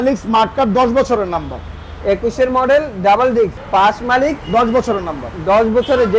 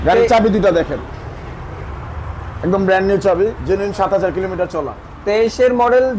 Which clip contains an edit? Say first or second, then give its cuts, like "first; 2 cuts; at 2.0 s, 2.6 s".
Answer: first; 1 cut; at 3.6 s